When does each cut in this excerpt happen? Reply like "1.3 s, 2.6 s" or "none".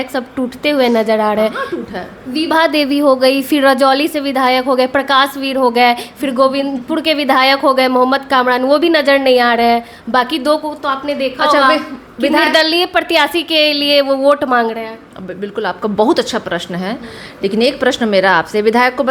none